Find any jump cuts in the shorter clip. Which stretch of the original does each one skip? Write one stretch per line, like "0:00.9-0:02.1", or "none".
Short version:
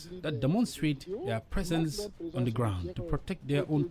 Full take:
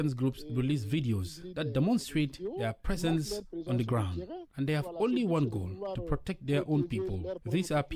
0:04.3-0:06.0